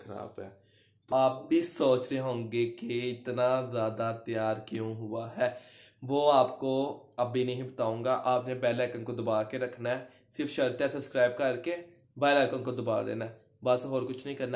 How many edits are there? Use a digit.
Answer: 1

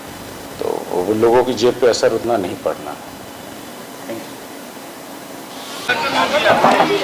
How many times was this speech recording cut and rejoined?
0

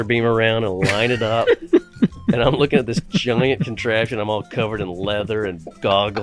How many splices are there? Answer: 0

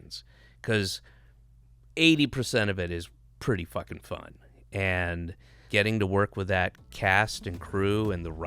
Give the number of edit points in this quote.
1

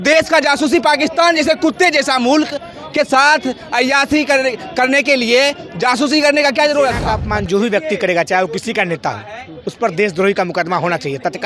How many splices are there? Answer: 1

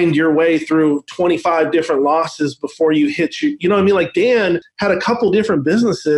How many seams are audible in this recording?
1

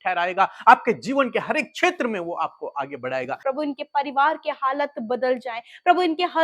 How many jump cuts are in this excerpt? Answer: 1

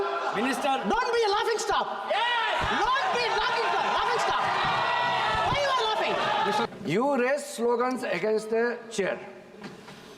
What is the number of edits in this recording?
1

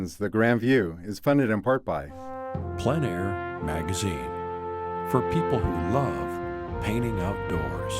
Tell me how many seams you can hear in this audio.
1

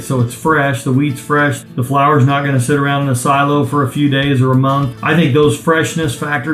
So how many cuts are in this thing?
2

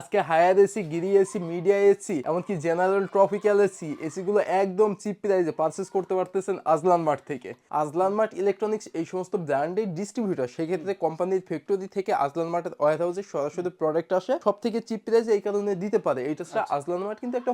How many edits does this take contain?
2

